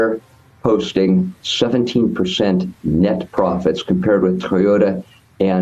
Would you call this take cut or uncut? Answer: uncut